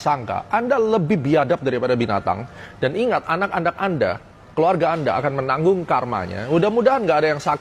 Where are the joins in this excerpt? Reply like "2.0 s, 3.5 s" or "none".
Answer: none